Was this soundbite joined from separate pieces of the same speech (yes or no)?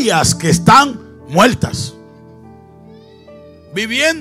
no